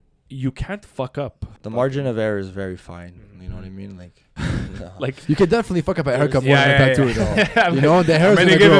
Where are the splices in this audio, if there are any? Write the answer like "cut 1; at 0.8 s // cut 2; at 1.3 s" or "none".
cut 1; at 1.5 s // cut 2; at 4.2 s